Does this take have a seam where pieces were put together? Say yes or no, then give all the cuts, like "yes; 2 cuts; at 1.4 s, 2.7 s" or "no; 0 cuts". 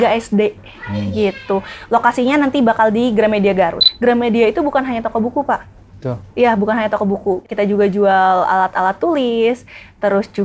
yes; 2 cuts; at 3.9 s, 7.5 s